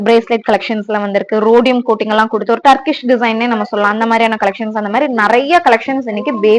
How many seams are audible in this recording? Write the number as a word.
zero